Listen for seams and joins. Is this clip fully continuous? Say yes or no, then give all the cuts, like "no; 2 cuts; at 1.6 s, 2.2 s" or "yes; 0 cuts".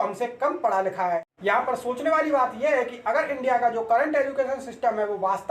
no; 1 cut; at 1.3 s